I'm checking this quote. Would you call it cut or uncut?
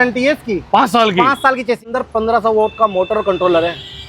cut